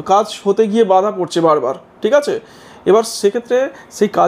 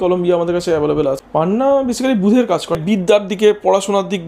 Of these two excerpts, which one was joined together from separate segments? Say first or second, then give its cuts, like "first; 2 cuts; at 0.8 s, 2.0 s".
second; 2 cuts; at 1.2 s, 2.8 s